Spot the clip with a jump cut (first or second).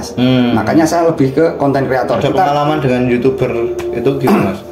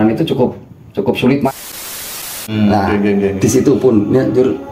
second